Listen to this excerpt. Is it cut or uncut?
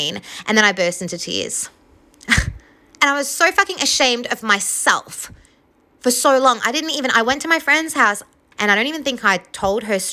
cut